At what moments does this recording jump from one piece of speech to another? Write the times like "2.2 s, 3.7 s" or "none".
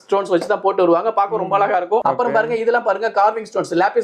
2.0 s